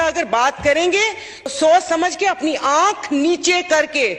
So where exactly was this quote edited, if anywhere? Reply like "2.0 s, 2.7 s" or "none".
1.5 s